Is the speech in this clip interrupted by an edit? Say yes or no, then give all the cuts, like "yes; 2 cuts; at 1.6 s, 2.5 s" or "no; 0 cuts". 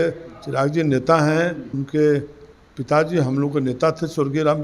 yes; 1 cut; at 1.8 s